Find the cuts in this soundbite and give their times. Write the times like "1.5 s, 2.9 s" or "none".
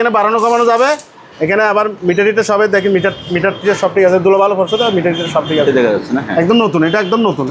none